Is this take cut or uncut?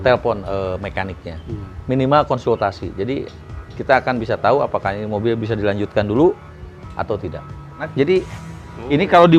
cut